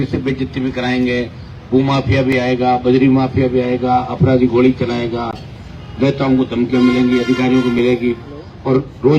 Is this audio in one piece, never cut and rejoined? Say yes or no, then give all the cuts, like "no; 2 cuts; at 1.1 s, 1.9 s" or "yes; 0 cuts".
yes; 0 cuts